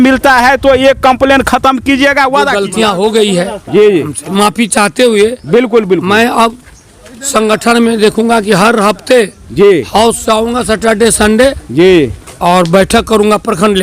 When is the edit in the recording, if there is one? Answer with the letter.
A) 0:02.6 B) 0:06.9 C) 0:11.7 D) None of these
A